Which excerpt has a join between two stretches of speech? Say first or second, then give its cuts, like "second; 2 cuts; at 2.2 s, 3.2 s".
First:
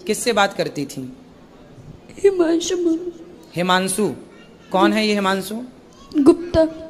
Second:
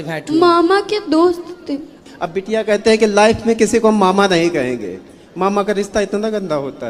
second; 1 cut; at 2.0 s